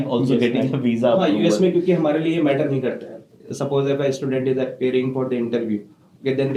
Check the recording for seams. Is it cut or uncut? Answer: uncut